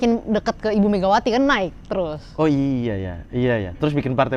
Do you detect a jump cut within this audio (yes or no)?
no